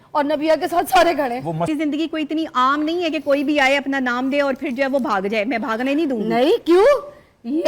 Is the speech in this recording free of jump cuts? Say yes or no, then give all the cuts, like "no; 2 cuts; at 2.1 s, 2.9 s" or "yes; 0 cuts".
no; 1 cut; at 1.7 s